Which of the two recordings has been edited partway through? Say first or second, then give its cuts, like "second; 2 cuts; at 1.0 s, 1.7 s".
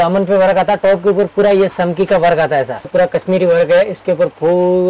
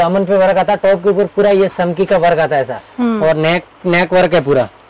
first; 1 cut; at 2.9 s